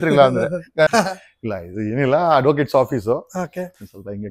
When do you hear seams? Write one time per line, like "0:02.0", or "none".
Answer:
0:00.9